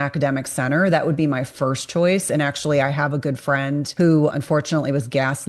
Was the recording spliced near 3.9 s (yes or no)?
yes